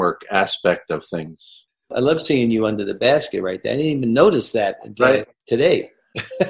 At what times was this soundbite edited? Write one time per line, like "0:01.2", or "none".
0:01.6
0:05.3